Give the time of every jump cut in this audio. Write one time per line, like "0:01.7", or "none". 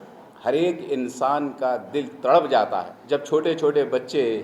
0:02.9